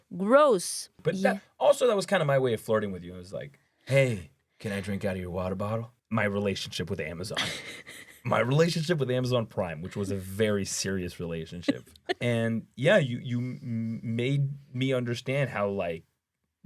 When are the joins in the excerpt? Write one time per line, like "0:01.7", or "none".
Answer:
0:00.9
0:05.9
0:12.2

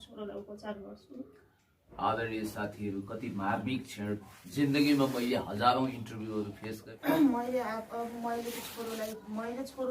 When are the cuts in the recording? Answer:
0:06.9

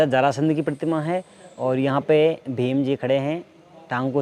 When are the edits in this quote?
none

